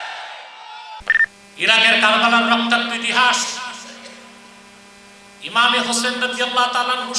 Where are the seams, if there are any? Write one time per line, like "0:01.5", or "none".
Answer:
0:01.0

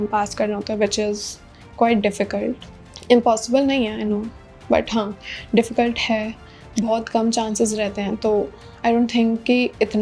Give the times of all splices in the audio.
none

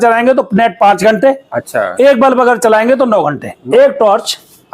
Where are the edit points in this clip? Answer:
0:03.5

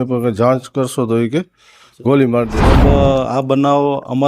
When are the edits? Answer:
0:02.7

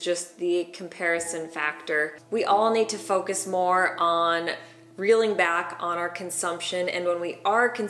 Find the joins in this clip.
0:02.2

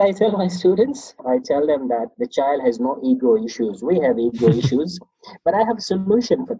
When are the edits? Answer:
0:01.1
0:02.2

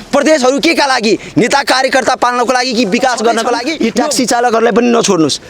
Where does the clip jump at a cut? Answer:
0:03.7

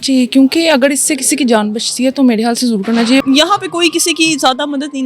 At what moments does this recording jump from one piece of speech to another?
0:03.2

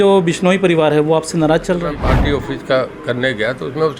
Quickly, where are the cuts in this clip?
0:02.0

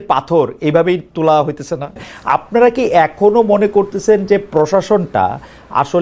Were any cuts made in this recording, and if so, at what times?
0:02.1

